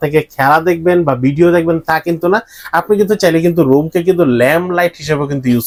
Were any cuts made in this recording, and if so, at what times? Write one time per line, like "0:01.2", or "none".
none